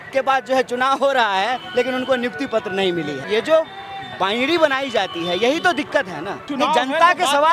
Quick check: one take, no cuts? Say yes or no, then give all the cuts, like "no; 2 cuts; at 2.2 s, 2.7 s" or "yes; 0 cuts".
no; 2 cuts; at 3.2 s, 6.4 s